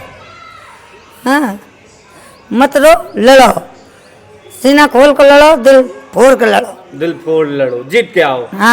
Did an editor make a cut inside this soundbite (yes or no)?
no